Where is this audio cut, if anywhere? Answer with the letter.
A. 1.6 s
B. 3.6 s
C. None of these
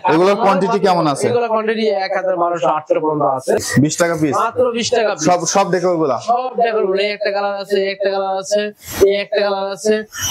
B